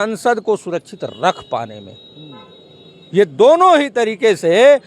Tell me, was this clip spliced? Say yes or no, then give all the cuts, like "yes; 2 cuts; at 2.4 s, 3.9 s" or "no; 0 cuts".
no; 0 cuts